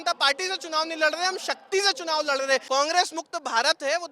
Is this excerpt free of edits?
no; 1 cut; at 2.6 s

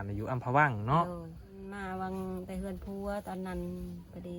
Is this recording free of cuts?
no; 1 cut; at 1.7 s

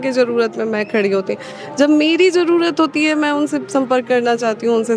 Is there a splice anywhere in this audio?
no; 0 cuts

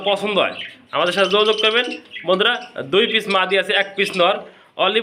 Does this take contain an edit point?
no; 0 cuts

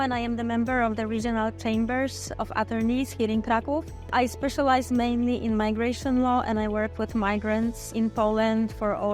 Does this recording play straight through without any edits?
no; 2 cuts; at 4.1 s, 7.9 s

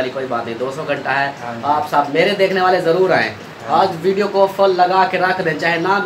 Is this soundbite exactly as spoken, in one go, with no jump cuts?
yes; 0 cuts

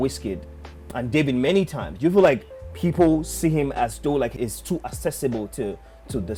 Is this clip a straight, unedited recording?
yes; 0 cuts

